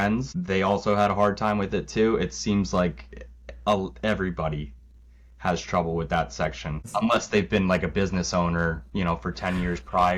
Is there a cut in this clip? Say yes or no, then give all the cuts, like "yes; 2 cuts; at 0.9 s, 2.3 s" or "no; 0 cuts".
no; 0 cuts